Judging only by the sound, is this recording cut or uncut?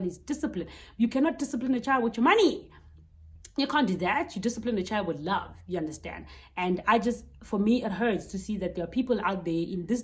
uncut